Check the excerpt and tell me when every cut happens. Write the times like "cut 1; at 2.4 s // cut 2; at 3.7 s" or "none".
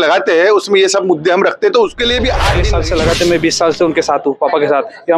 cut 1; at 2.5 s